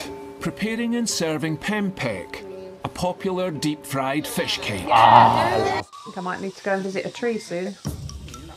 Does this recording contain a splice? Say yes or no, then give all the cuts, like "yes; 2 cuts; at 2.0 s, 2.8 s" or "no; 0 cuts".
yes; 1 cut; at 5.8 s